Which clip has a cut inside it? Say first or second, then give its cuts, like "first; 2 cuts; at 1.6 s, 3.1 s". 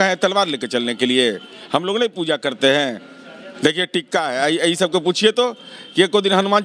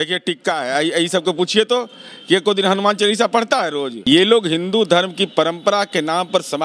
second; 1 cut; at 3.9 s